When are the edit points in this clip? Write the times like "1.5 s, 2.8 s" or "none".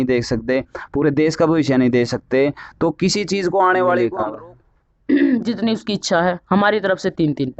4.2 s